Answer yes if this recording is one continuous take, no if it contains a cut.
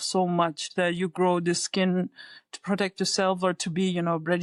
yes